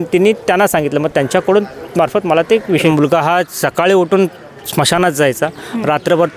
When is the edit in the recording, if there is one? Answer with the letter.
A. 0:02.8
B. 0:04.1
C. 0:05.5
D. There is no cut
A